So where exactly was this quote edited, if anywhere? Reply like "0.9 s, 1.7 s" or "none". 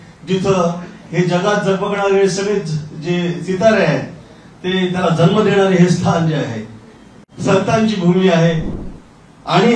8.8 s

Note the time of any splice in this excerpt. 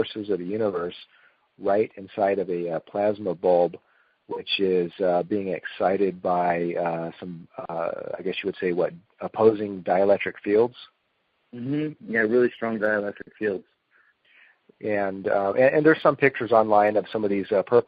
15.9 s

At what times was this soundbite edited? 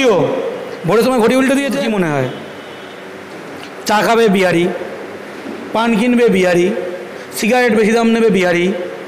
1.8 s

